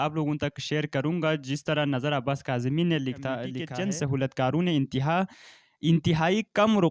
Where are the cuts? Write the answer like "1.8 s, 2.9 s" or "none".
3.6 s